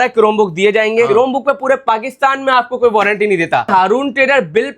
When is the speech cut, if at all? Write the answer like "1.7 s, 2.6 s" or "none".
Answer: 1.1 s, 3.7 s